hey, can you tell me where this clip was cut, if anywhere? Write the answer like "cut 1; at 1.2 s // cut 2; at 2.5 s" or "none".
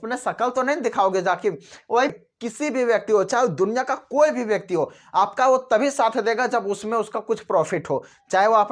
cut 1; at 2.2 s